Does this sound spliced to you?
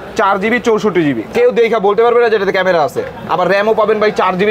yes; 1 cut; at 1.2 s

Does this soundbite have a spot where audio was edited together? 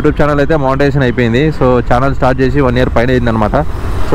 no; 0 cuts

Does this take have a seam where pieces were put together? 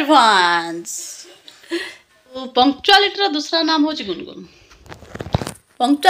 yes; 1 cut; at 2.5 s

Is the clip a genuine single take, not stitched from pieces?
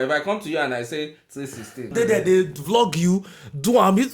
no; 1 cut; at 1.8 s

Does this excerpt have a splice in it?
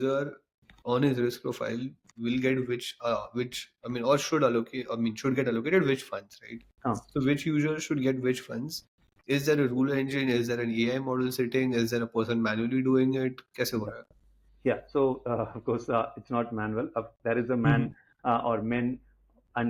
no; 0 cuts

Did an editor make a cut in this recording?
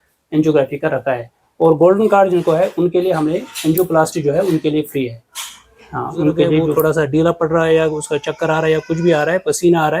yes; 1 cut; at 6.8 s

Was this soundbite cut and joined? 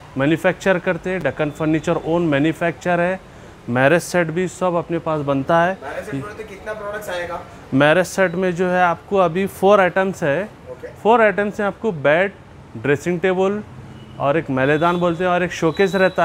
no; 0 cuts

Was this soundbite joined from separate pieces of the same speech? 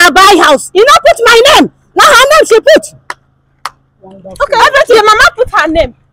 no; 0 cuts

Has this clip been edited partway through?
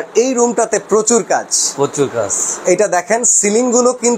no; 0 cuts

